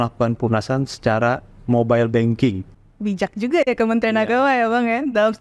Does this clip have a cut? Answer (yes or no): yes